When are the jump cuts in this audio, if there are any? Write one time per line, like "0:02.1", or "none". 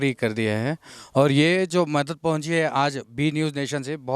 none